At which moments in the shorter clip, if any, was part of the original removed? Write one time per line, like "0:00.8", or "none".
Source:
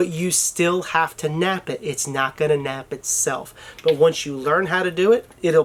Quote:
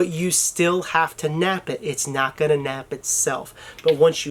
none

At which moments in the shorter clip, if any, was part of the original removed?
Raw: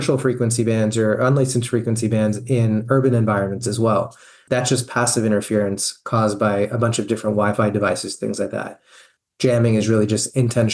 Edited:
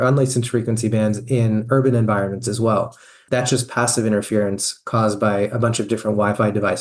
none

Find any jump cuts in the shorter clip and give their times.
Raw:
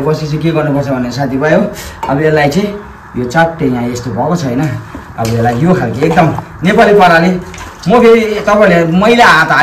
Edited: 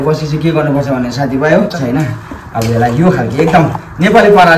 0:01.8

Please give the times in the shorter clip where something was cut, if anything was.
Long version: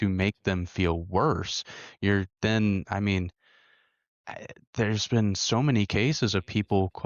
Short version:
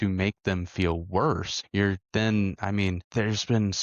0:01.6
0:03.0

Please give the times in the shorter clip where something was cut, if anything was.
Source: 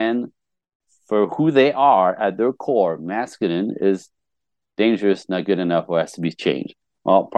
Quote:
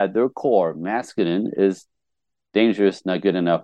none

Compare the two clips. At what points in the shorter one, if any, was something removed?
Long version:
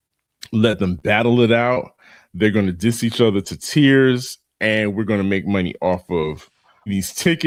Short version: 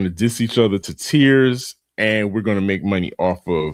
none

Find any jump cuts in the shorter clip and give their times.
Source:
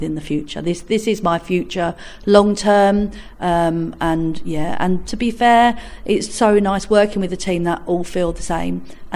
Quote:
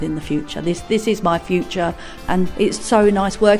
0:02.2

